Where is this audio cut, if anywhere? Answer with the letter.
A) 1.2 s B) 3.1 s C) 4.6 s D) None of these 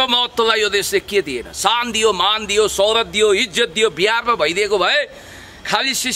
D